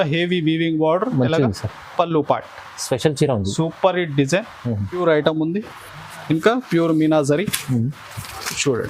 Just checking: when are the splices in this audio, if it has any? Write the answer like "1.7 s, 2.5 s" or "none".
5.0 s